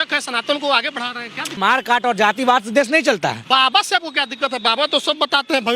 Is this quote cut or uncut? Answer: cut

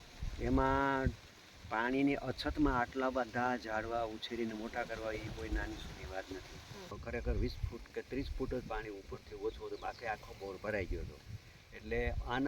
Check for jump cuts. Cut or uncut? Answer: cut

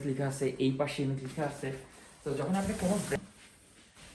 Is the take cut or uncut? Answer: cut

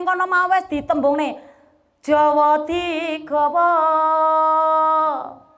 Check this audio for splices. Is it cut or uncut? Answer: uncut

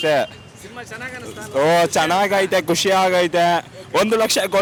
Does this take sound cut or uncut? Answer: uncut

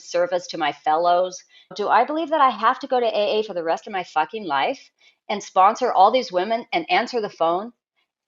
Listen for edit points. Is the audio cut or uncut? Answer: cut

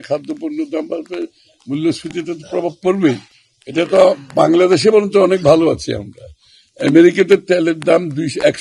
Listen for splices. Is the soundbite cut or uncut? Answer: uncut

